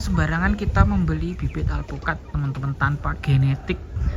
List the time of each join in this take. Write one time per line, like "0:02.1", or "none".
none